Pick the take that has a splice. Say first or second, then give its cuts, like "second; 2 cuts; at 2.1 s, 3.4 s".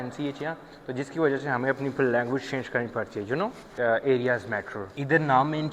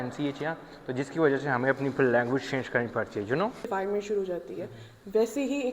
second; 1 cut; at 3.7 s